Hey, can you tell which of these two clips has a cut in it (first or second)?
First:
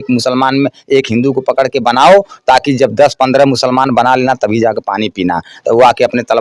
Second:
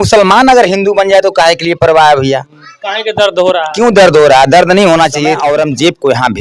second